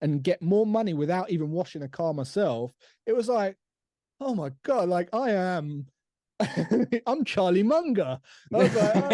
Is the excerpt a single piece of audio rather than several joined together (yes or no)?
yes